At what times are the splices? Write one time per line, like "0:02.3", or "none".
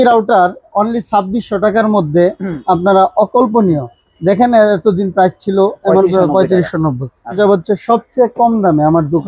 0:07.4